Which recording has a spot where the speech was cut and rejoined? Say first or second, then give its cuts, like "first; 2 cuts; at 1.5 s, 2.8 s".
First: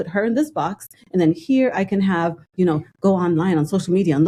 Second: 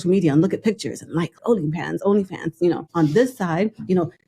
second; 2 cuts; at 1.4 s, 2.9 s